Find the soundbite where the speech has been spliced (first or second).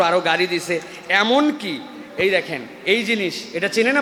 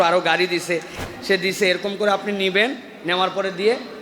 second